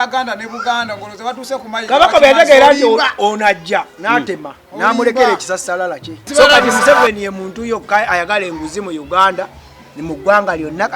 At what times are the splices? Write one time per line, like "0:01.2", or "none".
0:06.2